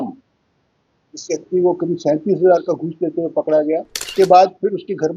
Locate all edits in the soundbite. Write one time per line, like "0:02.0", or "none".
0:04.0